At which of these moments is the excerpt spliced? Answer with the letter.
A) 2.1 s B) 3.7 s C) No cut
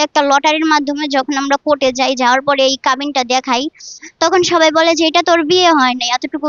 C